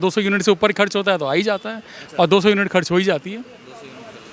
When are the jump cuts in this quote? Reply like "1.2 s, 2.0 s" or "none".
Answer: none